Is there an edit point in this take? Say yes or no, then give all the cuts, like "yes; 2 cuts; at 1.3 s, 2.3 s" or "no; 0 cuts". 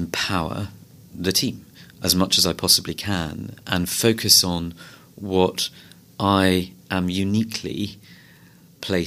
no; 0 cuts